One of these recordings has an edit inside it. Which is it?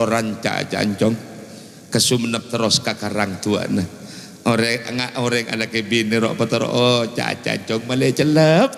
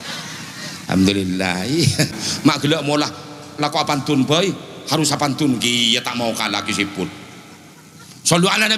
second; 1 cut; at 2.2 s

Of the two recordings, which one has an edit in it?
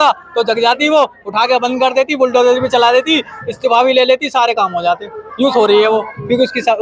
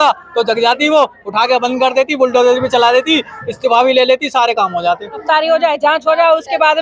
second; 1 cut; at 5.2 s

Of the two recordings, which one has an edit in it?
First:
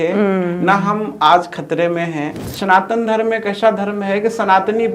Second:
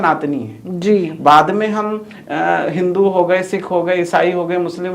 first; 1 cut; at 2.4 s

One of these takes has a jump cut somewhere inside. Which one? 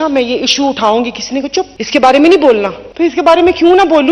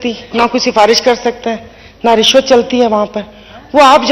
first; 2 cuts; at 1.8 s, 2.8 s

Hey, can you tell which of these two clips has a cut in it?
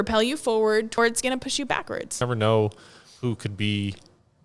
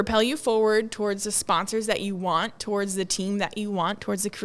first; 2 cuts; at 1.0 s, 2.2 s

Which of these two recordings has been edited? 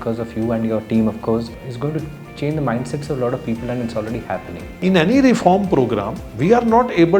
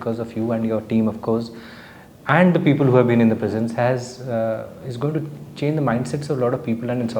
first; 2 cuts; at 1.6 s, 4.7 s

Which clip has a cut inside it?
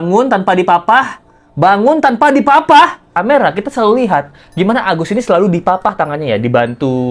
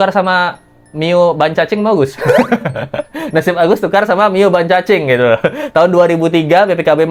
first; 1 cut; at 3.1 s

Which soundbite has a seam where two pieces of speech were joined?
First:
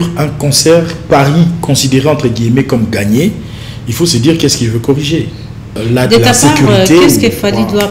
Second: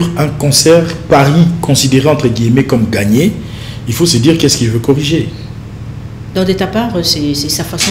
first; 1 cut; at 5.8 s

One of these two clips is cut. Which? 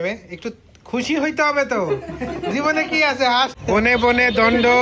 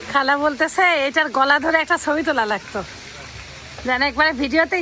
first; 1 cut; at 3.5 s

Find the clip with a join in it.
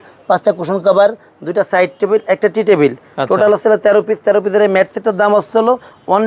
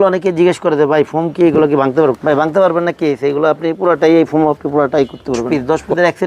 second; 2 cuts; at 2.2 s, 5.5 s

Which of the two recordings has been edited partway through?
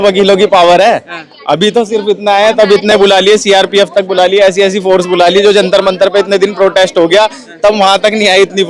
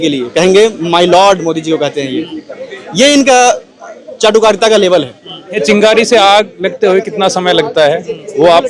second; 1 cut; at 5.6 s

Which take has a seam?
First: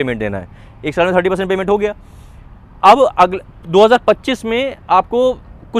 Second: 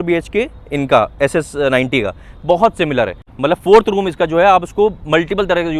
second; 1 cut; at 3.3 s

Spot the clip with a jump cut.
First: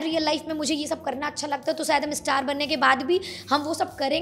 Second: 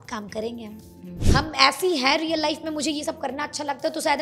second; 1 cut; at 1.1 s

